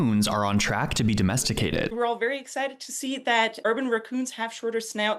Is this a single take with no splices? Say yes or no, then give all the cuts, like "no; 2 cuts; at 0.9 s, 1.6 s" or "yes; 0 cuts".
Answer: no; 2 cuts; at 1.9 s, 3.6 s